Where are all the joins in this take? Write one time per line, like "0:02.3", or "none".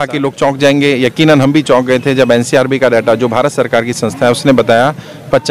none